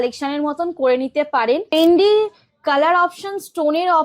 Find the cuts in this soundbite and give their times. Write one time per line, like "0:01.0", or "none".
0:01.7